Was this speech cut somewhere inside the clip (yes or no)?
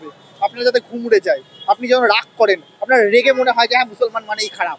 no